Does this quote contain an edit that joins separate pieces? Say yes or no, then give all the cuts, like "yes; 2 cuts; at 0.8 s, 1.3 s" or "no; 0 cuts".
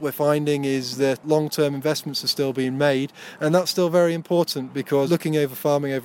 yes; 2 cuts; at 1.2 s, 5.1 s